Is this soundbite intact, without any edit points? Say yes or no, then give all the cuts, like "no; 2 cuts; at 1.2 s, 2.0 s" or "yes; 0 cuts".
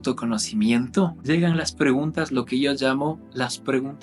no; 1 cut; at 1.2 s